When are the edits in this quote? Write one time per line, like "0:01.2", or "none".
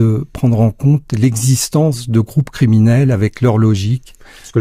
none